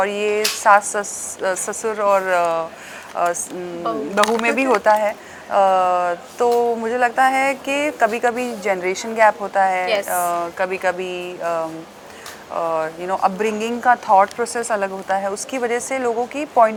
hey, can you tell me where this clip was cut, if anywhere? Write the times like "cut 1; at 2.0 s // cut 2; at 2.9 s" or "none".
none